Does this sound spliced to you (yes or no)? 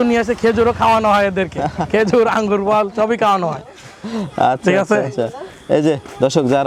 no